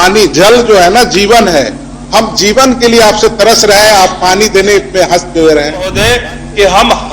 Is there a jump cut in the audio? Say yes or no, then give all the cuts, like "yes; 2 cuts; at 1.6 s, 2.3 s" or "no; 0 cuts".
yes; 1 cut; at 6.0 s